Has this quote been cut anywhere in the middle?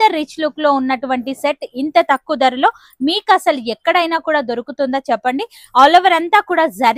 no; 0 cuts

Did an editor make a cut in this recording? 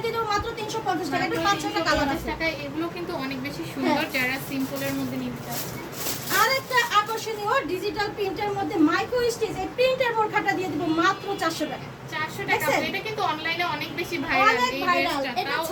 no; 0 cuts

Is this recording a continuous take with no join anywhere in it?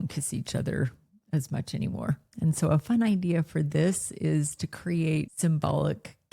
no; 1 cut; at 5.3 s

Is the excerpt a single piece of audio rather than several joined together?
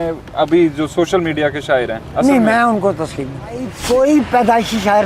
no; 1 cut; at 3.8 s

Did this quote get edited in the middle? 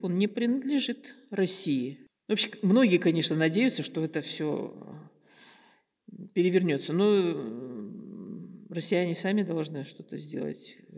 yes; 1 cut; at 2.1 s

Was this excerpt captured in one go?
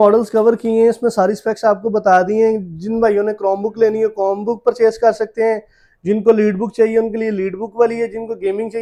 yes; 0 cuts

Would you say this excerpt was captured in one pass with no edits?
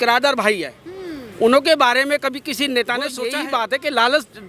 no; 1 cut; at 3.3 s

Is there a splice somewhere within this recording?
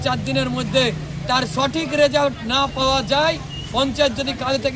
no; 0 cuts

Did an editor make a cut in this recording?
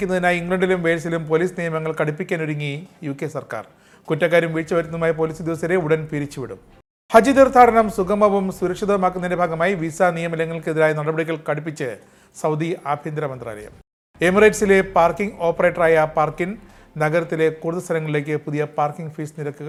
no; 0 cuts

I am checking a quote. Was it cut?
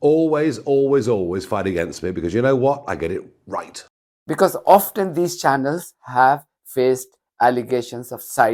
no; 0 cuts

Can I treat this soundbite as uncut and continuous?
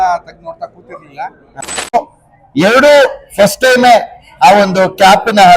no; 1 cut; at 1.9 s

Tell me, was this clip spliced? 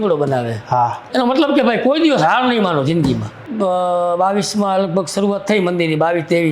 yes; 2 cuts; at 1.0 s, 3.4 s

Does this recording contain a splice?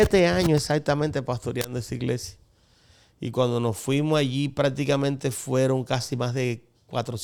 no; 0 cuts

